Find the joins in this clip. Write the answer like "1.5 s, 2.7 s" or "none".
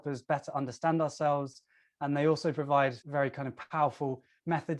3.0 s